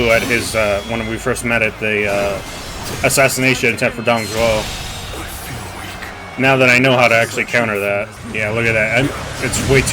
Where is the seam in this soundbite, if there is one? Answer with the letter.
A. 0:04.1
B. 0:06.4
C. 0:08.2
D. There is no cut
C